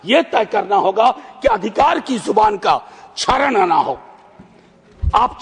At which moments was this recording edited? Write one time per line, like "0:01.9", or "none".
none